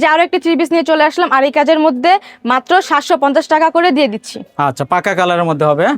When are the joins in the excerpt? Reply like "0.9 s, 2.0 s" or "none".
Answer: none

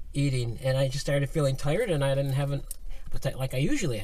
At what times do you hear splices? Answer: 3.0 s

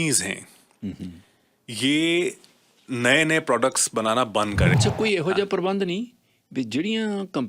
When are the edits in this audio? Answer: 4.8 s

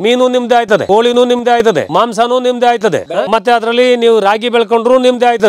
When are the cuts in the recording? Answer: 3.1 s

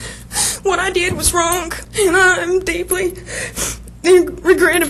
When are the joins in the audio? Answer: 1.8 s

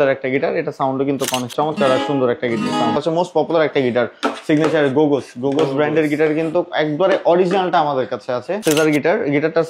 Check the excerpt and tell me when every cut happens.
1.5 s, 3.0 s, 8.5 s

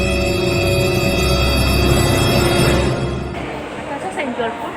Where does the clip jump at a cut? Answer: 3.4 s

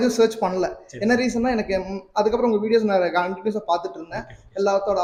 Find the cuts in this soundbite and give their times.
none

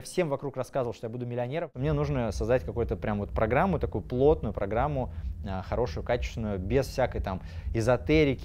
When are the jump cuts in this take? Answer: 1.7 s

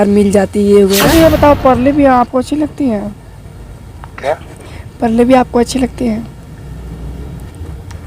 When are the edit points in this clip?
1.0 s

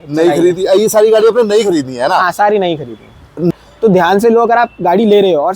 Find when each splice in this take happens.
3.7 s

